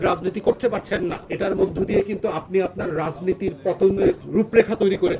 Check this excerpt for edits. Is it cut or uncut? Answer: cut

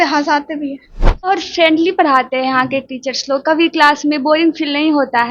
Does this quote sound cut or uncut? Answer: cut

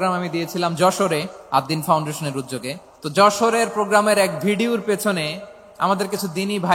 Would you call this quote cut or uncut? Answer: cut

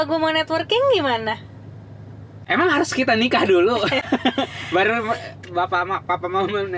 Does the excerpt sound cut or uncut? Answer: uncut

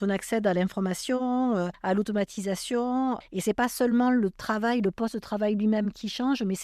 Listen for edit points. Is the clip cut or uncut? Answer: cut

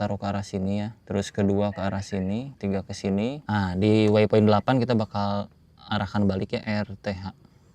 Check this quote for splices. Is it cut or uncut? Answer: cut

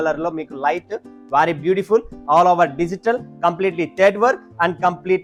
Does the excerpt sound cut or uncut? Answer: uncut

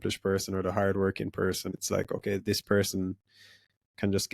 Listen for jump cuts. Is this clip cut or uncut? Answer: cut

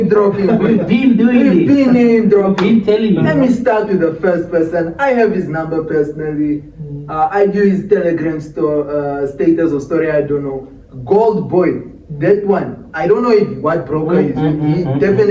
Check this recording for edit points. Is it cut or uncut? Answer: uncut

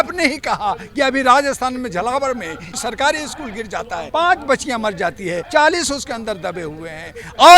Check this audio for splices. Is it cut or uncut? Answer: cut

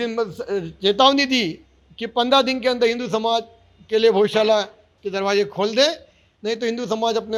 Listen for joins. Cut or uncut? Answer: uncut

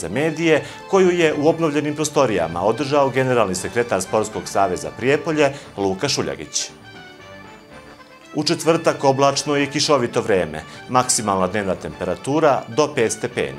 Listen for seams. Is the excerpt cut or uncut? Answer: uncut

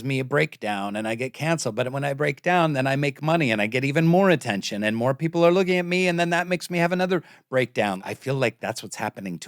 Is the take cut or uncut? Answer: cut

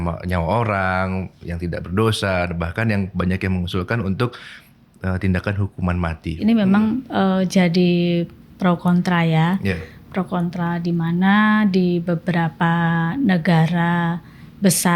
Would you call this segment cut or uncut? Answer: cut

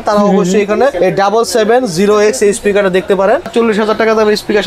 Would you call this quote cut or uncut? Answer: cut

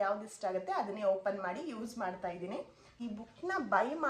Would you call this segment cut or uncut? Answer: cut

